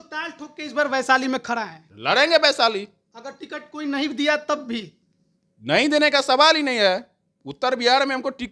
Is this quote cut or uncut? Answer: uncut